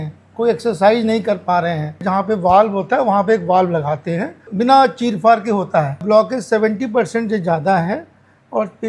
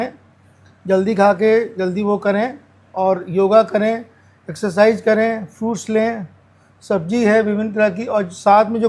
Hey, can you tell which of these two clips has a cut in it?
first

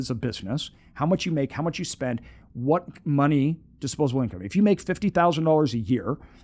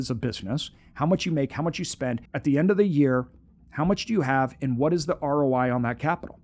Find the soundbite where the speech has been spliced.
second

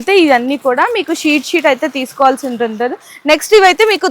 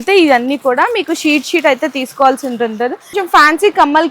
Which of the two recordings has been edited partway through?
second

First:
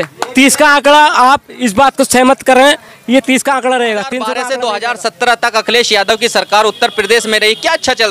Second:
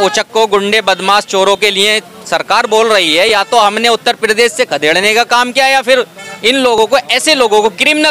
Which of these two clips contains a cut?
first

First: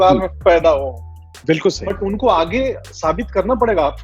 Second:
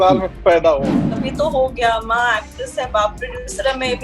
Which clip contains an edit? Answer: second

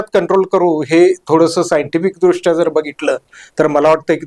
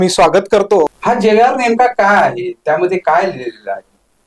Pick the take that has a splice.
second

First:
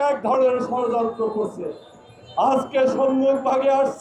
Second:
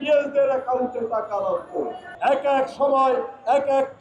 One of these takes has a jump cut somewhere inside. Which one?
second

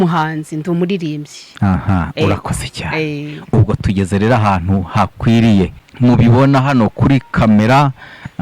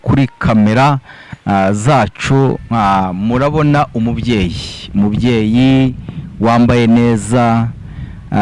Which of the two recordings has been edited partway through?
first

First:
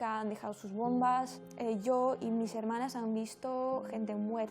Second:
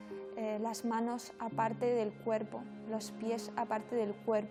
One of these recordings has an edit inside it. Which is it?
first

